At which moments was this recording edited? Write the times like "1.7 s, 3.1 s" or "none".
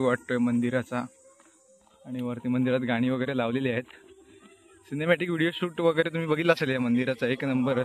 none